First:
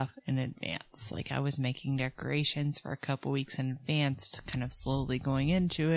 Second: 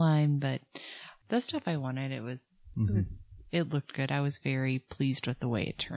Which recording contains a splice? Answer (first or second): second